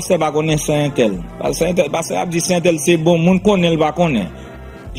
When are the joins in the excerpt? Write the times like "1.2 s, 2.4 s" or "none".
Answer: none